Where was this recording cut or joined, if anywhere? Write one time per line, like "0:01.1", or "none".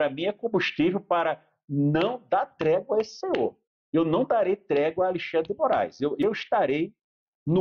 0:06.2